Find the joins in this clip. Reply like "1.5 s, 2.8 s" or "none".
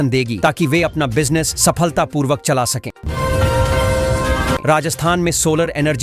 3.0 s, 4.6 s